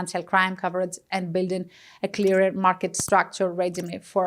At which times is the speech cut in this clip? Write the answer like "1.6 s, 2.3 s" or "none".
none